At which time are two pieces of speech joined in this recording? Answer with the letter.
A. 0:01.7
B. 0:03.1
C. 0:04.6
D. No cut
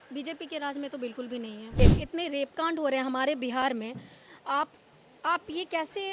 A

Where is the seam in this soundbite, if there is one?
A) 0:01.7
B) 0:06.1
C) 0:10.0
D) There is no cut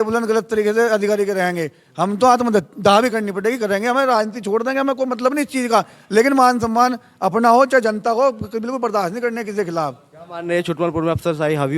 D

